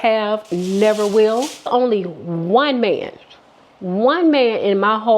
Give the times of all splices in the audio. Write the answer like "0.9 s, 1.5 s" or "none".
1.7 s